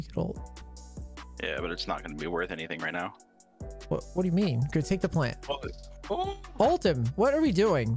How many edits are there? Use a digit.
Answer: 0